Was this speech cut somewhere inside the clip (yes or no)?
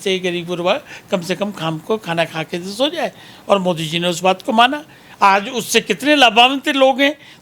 no